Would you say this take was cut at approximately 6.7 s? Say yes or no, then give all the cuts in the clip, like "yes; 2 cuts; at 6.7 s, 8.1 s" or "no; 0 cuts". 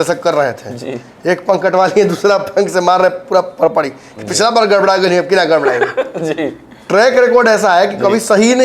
no; 0 cuts